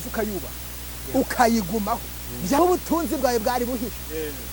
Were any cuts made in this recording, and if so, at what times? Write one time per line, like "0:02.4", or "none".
0:02.6

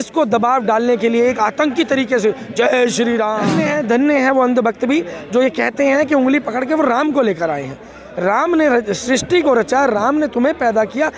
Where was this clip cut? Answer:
0:03.5

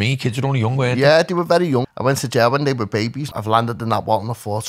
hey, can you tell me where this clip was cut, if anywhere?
0:01.9
0:03.2

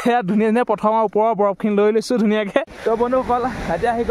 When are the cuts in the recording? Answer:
0:02.7

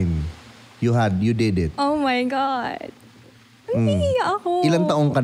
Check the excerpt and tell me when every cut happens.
none

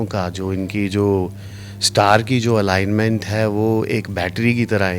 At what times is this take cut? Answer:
none

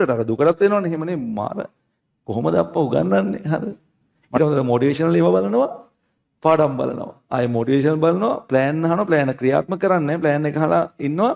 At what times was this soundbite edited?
0:04.4

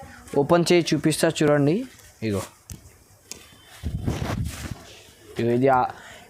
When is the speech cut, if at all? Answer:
none

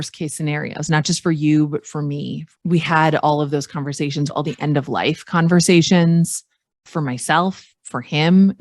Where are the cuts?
0:02.3
0:04.3
0:06.8

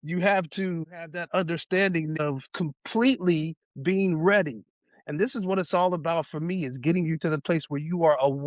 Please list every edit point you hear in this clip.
0:01.0
0:02.3

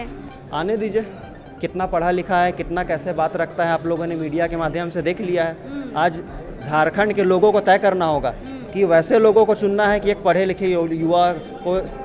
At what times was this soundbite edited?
none

